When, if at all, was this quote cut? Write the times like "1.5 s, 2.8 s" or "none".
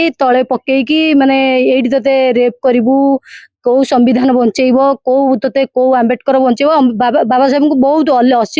none